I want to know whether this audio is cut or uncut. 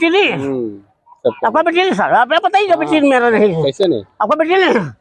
uncut